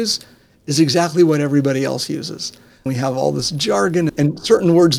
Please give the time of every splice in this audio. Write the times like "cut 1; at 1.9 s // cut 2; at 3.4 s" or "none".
cut 1; at 2.9 s // cut 2; at 4.1 s